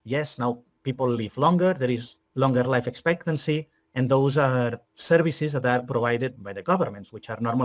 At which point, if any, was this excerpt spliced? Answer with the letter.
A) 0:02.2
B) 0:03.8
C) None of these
A